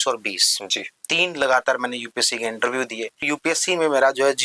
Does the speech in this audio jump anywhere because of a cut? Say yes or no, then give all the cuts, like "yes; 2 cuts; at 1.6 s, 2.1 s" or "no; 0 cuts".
yes; 1 cut; at 3.3 s